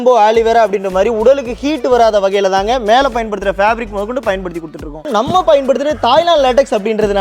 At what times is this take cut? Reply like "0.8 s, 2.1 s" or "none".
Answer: 5.1 s

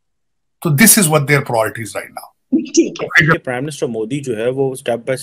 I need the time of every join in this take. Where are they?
3.3 s

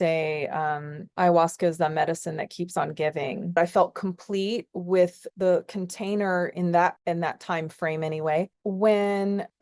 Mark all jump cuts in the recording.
3.6 s, 5.3 s, 8.5 s

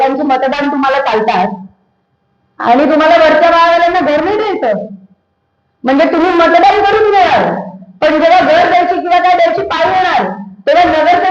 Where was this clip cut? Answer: none

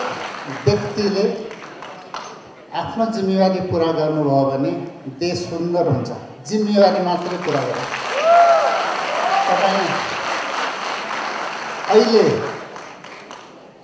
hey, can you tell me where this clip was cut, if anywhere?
none

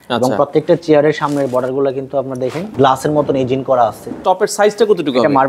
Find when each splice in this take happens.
2.7 s, 4.1 s

